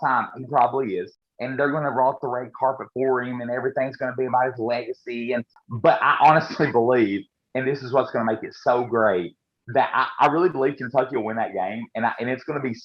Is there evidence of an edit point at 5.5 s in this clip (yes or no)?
yes